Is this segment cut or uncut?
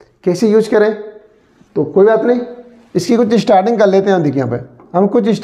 uncut